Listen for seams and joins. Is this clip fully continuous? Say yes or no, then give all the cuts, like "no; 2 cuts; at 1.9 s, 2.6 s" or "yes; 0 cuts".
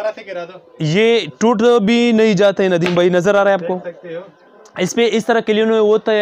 yes; 0 cuts